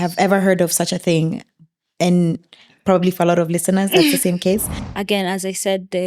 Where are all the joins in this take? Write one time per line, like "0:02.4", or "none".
0:04.8